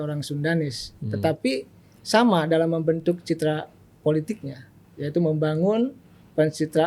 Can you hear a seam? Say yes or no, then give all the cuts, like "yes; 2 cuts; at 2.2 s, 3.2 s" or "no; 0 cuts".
no; 0 cuts